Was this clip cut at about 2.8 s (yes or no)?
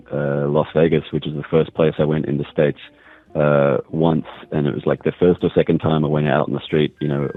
no